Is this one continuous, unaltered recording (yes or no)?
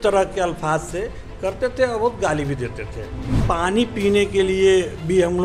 no